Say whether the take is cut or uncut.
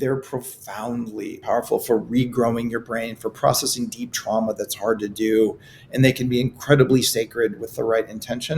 cut